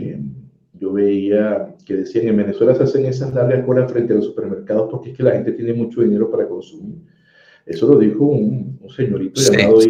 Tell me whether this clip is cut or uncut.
uncut